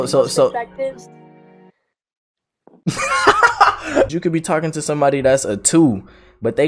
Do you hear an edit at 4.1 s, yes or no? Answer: yes